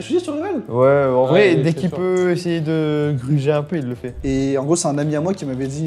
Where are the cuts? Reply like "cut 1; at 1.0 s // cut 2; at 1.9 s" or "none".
cut 1; at 4.1 s